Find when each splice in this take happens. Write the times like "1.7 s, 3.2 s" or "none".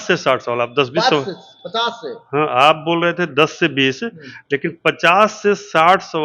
none